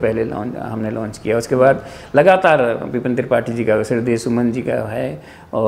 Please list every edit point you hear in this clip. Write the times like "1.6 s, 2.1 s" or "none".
none